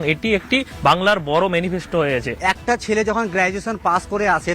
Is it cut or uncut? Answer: uncut